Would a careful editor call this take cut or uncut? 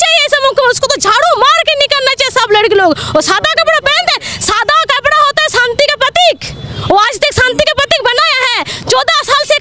uncut